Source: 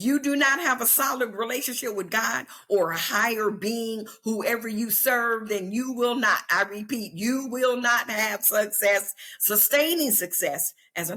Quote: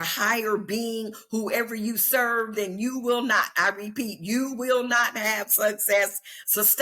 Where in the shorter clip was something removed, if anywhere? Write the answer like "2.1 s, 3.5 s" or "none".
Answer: none